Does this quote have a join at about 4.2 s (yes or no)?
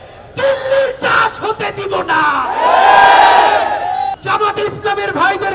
yes